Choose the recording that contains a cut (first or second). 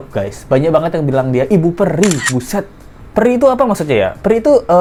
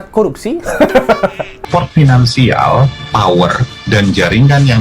second